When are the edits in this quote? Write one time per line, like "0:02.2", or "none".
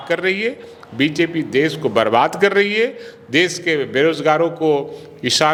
none